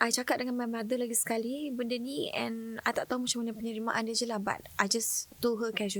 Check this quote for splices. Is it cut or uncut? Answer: uncut